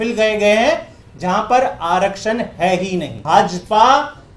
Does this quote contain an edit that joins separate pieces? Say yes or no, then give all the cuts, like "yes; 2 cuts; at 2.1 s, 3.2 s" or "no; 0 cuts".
yes; 1 cut; at 3.2 s